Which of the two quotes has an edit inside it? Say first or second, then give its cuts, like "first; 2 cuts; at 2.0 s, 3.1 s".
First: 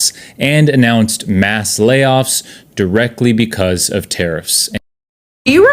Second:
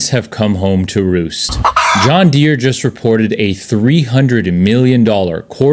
first; 1 cut; at 4.8 s